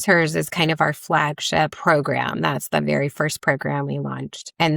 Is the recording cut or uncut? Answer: cut